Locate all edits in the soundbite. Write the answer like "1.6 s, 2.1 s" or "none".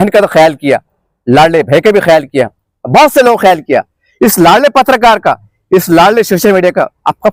none